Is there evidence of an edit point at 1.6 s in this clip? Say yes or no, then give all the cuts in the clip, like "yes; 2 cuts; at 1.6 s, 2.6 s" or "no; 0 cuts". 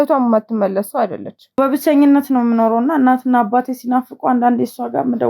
yes; 1 cut; at 1.6 s